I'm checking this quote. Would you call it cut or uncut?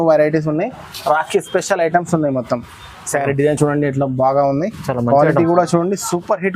uncut